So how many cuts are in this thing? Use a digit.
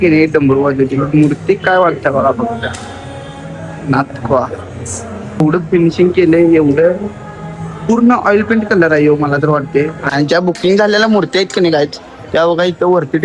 2